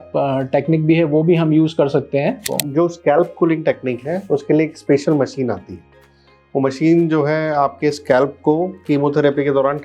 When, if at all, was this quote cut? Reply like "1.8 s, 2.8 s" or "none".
2.5 s